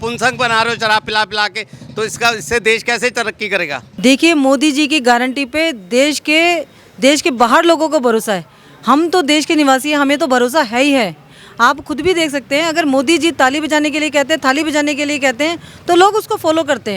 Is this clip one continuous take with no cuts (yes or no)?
no